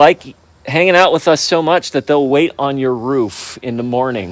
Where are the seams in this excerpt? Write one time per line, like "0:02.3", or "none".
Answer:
none

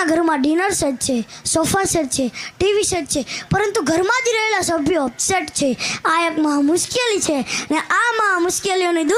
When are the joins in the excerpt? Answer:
none

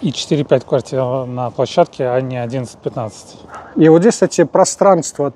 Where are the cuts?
none

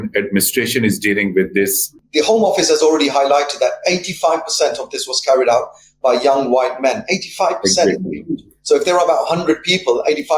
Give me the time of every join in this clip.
0:02.0

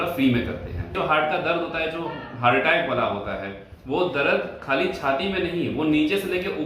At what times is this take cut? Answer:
0:00.9

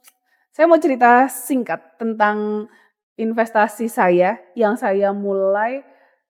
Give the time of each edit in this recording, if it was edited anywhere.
none

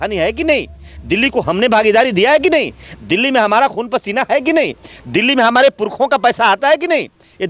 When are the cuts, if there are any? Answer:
none

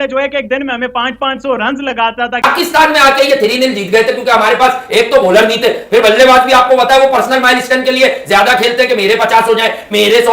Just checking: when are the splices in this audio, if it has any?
0:02.4

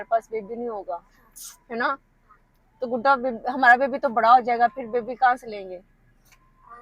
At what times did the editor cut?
none

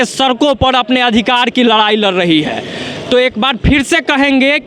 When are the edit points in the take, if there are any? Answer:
none

